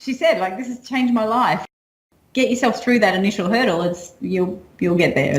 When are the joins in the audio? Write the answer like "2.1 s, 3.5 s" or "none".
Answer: 1.7 s